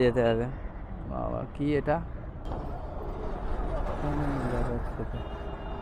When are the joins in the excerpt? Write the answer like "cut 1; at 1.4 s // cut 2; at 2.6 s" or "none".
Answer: cut 1; at 2.4 s